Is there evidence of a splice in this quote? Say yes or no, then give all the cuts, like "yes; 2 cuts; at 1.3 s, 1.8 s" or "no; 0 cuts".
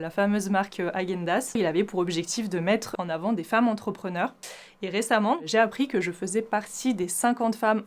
yes; 2 cuts; at 1.6 s, 5.4 s